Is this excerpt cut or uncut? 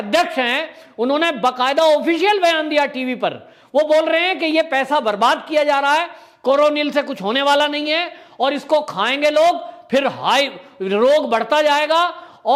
uncut